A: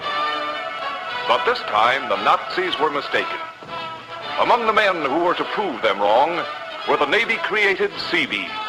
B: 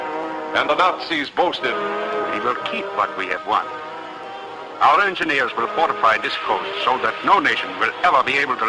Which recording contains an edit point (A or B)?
B